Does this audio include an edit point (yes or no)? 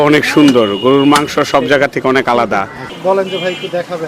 yes